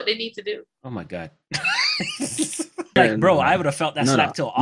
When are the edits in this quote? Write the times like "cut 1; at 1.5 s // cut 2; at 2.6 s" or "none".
cut 1; at 3.0 s